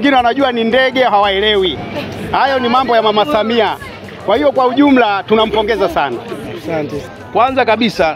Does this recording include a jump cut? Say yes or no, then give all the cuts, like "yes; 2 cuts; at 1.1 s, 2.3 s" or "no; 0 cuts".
yes; 1 cut; at 7.0 s